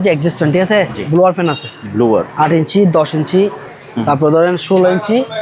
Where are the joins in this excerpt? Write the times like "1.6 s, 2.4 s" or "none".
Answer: 1.0 s